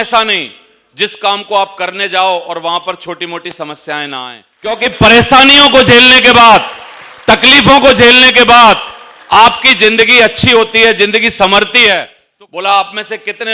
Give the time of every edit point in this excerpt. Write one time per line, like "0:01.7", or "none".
0:04.8
0:12.2

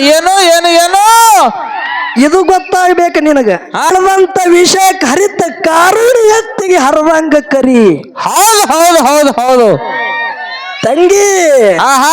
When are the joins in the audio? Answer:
0:03.9

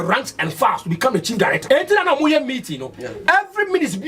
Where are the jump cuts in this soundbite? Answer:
0:01.6

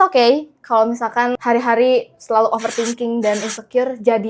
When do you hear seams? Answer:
0:01.4

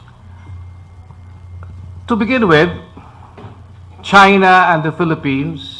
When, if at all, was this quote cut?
0:01.9

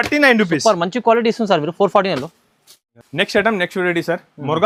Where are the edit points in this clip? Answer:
none

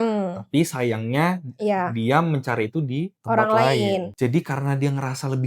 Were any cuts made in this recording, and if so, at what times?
0:03.1
0:04.1

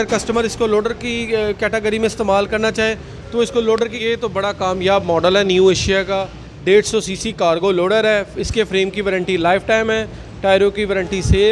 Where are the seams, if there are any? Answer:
0:04.0

